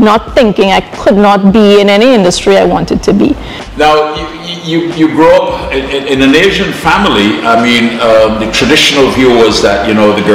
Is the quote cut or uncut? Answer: uncut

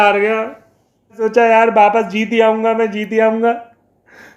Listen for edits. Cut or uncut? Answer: cut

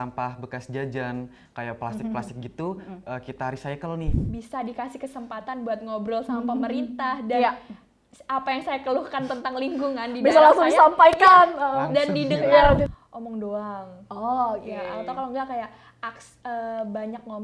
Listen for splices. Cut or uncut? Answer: cut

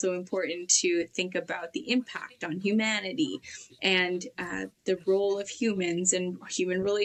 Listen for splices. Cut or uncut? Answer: uncut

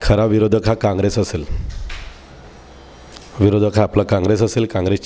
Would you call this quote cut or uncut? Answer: uncut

